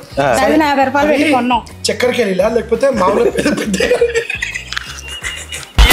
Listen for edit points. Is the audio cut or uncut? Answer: uncut